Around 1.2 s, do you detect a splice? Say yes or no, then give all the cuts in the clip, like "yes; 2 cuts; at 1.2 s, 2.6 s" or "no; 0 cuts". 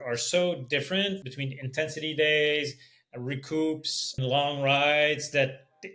yes; 2 cuts; at 1.2 s, 4.2 s